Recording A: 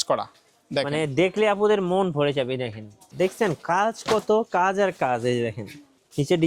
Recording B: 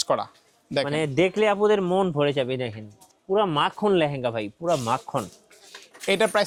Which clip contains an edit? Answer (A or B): A